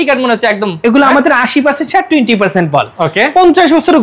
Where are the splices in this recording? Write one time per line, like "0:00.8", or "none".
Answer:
none